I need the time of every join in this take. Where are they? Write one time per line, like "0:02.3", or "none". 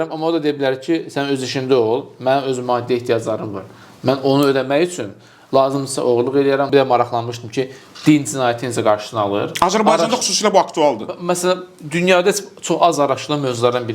0:06.7

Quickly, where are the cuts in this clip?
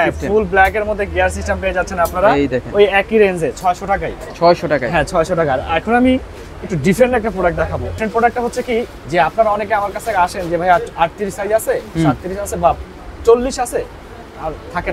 none

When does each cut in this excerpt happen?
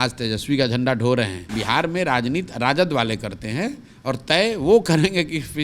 0:01.5

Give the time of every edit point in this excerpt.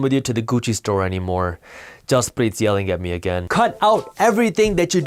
none

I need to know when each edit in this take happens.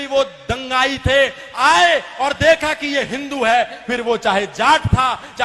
none

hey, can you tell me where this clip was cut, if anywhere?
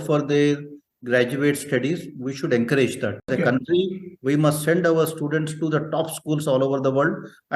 0:03.3

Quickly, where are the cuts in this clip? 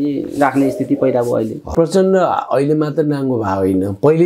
0:01.7

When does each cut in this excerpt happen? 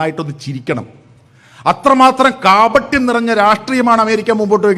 none

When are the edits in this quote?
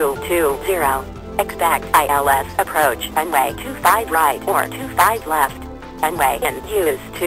0:01.1
0:05.5

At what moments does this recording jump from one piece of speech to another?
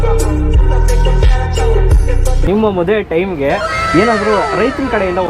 0:02.4

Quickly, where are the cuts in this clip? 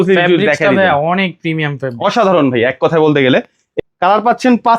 0:03.6

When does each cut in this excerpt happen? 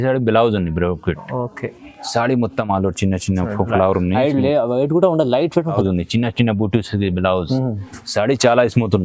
0:05.8

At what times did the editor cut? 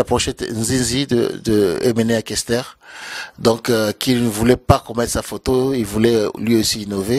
none

